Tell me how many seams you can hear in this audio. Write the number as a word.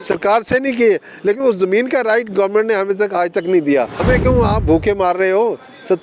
one